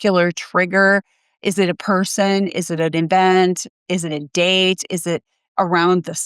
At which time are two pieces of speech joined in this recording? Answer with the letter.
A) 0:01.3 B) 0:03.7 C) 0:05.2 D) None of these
D